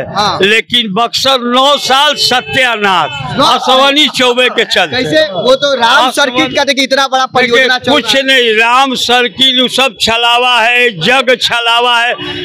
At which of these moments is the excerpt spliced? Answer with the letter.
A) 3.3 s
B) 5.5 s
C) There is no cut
C